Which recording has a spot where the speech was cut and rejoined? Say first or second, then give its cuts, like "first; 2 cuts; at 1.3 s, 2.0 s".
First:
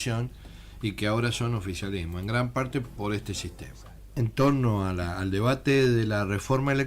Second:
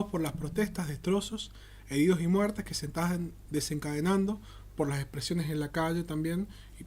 first; 1 cut; at 4.2 s